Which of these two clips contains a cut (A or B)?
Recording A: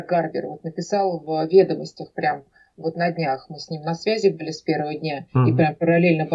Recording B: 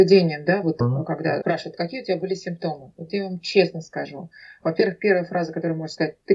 B